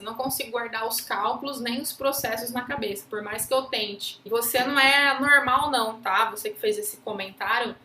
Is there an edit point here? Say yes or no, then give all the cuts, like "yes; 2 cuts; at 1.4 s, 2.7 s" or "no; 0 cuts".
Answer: yes; 1 cut; at 4.2 s